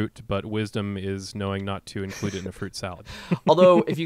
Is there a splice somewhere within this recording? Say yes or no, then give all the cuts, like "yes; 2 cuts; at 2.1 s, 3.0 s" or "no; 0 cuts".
yes; 1 cut; at 3.1 s